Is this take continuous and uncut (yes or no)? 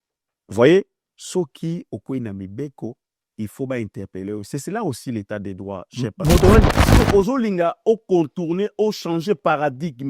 no